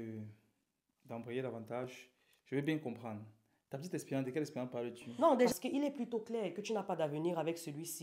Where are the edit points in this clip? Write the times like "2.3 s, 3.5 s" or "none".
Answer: 5.5 s